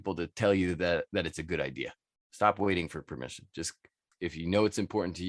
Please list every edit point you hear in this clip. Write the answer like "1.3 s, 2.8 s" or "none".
4.2 s